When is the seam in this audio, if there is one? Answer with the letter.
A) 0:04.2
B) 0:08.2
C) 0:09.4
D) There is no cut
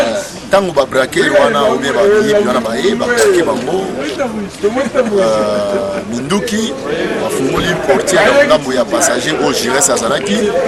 D